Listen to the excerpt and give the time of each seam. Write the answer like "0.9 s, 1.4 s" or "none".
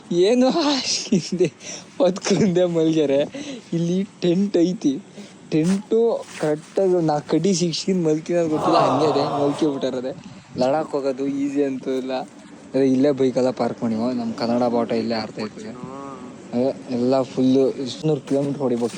18.0 s